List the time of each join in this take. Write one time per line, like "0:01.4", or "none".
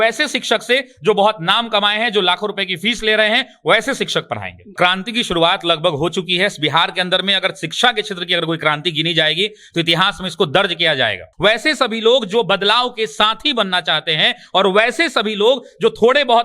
0:04.7
0:11.2

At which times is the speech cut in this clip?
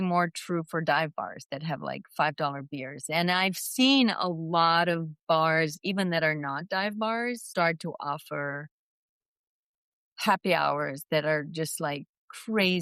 none

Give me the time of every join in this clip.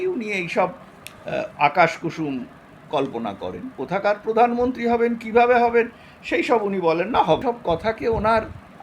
0:03.7
0:07.4

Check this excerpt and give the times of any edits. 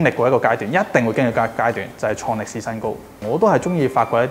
0:03.1

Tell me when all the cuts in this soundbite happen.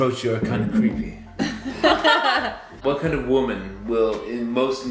0:02.7

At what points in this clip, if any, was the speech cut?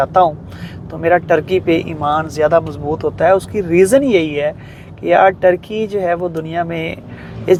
none

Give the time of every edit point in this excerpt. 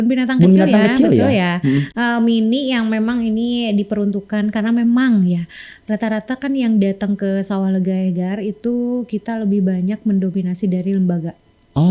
none

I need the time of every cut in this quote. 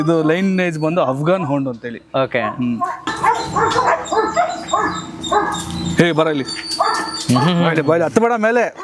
0:03.0

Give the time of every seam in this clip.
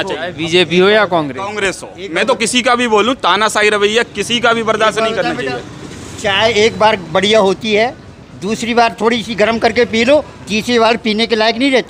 none

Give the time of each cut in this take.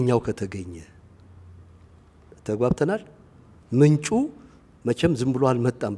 none

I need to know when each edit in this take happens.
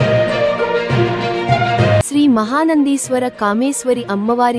0:01.2

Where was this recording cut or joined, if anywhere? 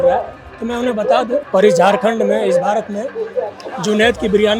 0:01.4

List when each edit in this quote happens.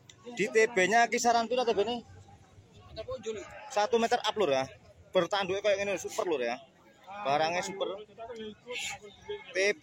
none

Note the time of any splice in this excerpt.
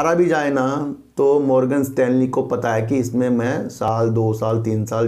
none

